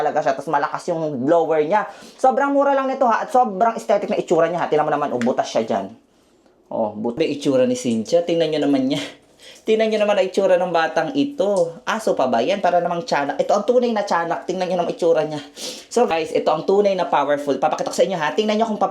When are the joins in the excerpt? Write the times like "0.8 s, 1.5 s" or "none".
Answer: 7.1 s

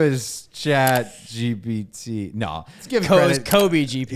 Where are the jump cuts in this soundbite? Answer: 2.8 s

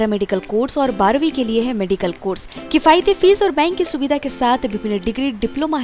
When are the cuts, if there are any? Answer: none

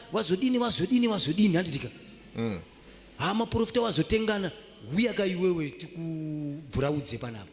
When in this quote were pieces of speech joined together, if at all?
none

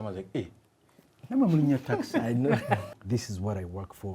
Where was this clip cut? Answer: 2.8 s

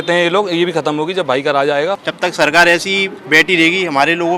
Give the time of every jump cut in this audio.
2.1 s

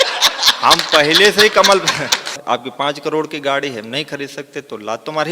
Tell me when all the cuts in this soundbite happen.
2.3 s

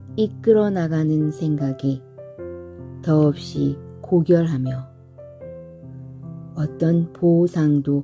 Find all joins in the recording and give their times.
5.3 s, 6.5 s

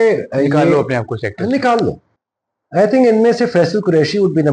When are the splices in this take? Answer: 2.0 s

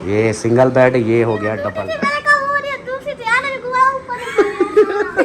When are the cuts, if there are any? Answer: 1.6 s

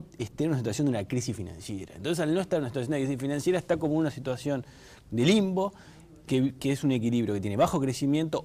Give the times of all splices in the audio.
none

